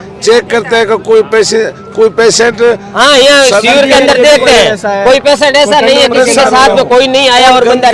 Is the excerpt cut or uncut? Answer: uncut